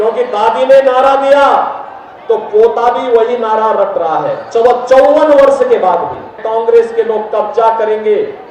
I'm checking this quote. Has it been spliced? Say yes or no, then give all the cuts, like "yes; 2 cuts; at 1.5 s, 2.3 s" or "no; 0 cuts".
yes; 1 cut; at 6.4 s